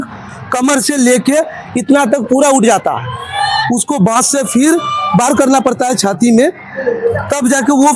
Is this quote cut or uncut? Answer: uncut